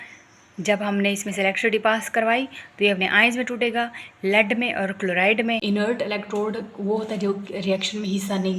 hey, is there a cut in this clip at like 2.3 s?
no; 1 cut; at 5.6 s

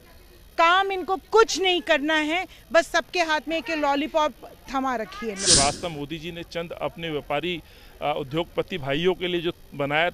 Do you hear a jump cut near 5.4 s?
yes; 1 cut; at 5.4 s

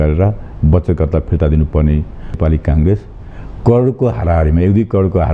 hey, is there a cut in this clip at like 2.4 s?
yes; 1 cut; at 2.4 s

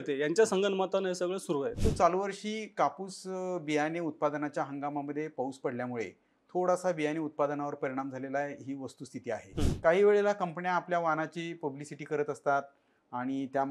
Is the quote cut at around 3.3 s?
no; 2 cuts; at 1.8 s, 9.5 s

